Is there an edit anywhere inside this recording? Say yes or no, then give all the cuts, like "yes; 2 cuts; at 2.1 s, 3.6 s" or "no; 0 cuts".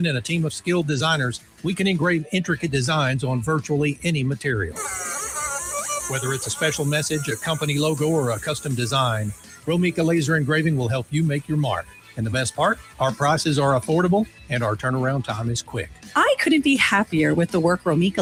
no; 0 cuts